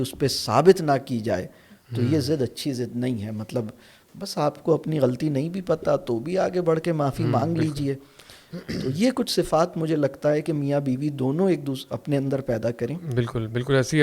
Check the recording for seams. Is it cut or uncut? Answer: uncut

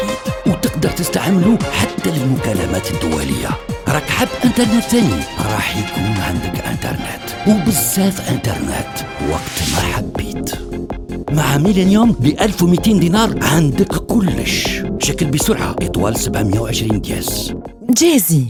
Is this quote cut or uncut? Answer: uncut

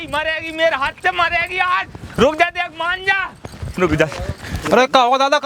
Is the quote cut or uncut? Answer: cut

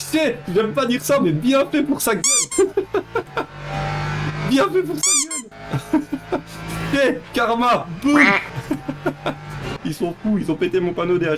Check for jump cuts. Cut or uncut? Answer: cut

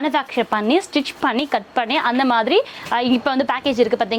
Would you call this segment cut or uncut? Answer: uncut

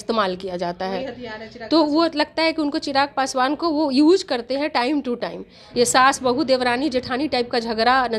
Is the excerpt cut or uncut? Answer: cut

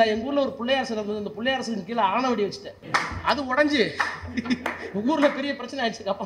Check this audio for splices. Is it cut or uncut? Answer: cut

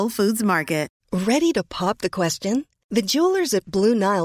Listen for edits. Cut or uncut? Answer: cut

